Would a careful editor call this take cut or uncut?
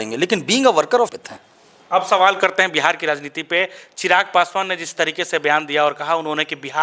cut